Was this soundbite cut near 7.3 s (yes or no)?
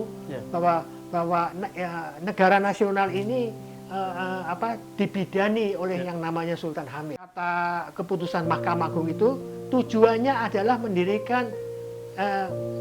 yes